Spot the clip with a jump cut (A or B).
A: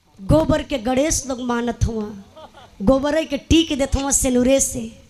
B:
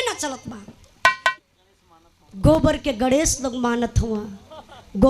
B